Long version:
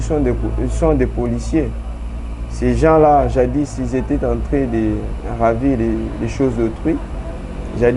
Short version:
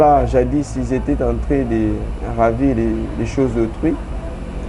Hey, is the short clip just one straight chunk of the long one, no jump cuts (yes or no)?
yes